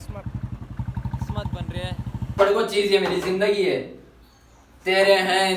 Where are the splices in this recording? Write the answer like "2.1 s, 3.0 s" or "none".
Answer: 2.4 s